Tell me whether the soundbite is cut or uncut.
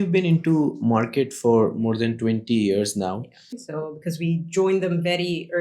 cut